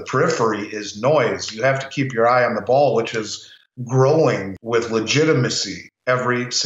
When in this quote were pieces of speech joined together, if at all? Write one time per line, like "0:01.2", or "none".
0:04.5

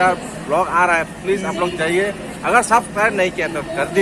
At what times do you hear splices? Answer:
none

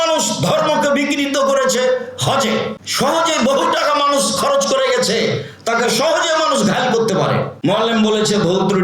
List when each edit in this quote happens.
0:02.8
0:07.5

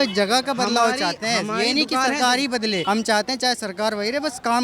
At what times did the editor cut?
0:02.8

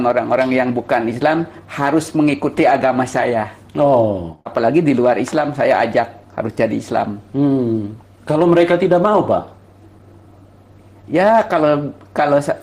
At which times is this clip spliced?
0:04.4

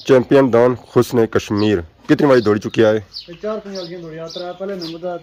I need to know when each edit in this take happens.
none

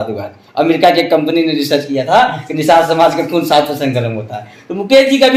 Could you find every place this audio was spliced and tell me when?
none

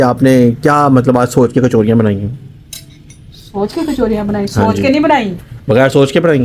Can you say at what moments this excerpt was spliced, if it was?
none

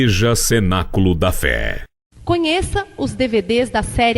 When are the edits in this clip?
0:01.9

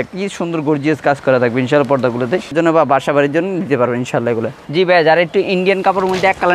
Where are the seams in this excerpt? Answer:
0:02.5
0:04.6

